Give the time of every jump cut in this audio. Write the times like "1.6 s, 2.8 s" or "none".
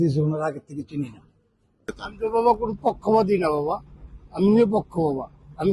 none